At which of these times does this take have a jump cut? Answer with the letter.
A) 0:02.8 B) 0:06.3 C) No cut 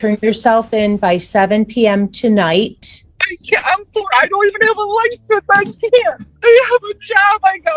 B